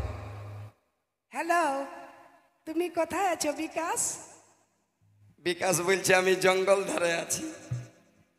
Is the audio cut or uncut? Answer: uncut